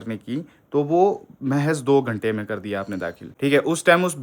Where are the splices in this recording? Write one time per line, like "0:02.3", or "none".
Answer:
0:03.3